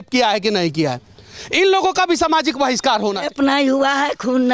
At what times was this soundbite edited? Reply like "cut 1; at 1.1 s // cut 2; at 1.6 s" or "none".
cut 1; at 3.2 s